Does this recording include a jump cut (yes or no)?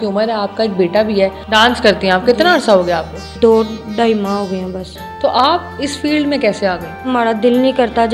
yes